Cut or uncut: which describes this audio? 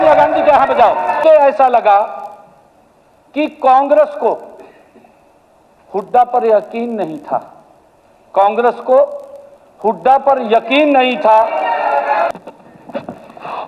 cut